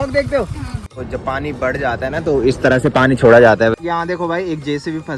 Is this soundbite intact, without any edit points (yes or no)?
no